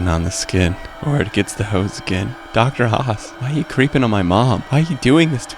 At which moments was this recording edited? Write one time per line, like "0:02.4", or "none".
0:00.9
0:02.4
0:03.3
0:04.6